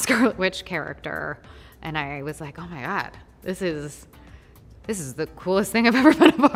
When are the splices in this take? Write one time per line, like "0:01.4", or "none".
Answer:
none